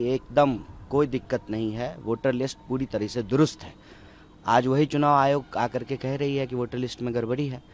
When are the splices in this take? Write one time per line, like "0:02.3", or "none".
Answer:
none